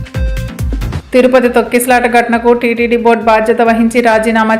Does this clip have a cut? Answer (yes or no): no